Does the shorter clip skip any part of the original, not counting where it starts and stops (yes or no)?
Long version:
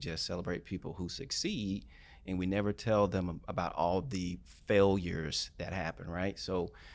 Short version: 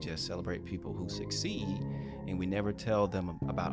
no